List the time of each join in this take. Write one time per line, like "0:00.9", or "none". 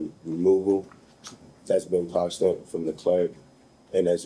none